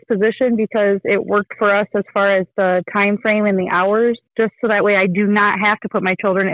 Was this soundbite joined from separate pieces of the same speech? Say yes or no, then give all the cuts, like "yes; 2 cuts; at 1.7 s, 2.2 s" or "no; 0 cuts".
no; 0 cuts